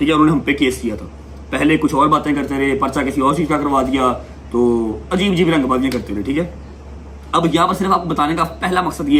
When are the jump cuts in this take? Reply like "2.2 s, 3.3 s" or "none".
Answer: none